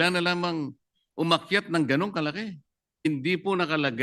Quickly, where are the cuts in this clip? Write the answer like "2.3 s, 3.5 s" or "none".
3.1 s